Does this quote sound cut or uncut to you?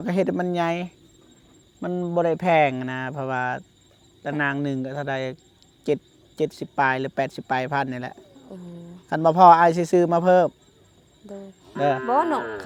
uncut